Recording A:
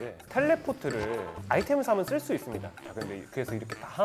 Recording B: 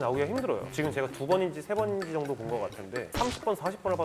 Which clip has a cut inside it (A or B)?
A